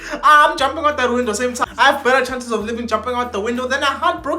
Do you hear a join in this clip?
yes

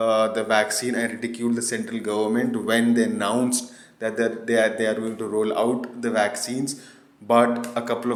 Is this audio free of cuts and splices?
yes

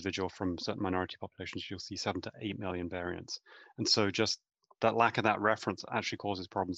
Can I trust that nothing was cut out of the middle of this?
yes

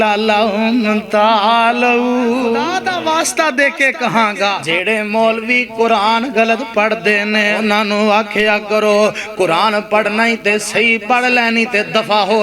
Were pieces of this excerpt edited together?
yes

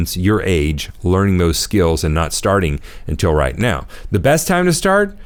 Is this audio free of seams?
yes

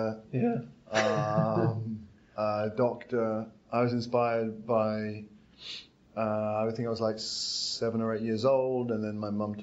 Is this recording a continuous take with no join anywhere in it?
yes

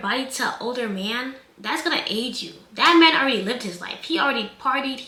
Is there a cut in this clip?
no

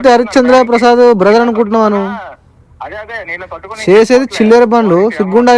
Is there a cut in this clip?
no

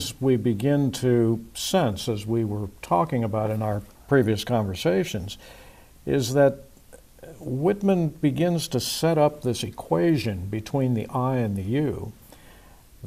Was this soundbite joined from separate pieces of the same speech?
no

